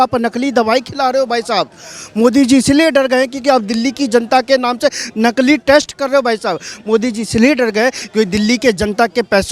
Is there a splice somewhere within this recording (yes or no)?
no